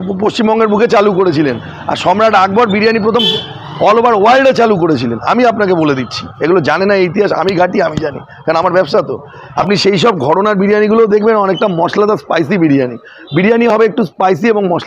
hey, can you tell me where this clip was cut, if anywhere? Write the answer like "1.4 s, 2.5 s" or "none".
9.4 s